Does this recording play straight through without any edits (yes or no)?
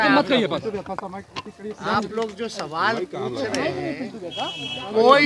yes